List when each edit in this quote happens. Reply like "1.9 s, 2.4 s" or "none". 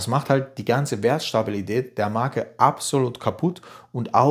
none